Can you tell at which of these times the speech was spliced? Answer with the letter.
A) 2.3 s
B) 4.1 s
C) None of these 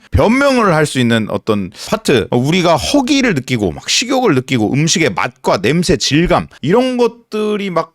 A